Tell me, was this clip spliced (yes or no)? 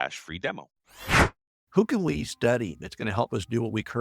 yes